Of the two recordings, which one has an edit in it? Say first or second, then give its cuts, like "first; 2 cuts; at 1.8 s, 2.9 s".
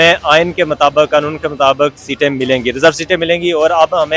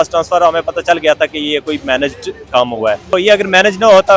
second; 1 cut; at 3.1 s